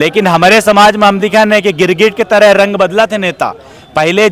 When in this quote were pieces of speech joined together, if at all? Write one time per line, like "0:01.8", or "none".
none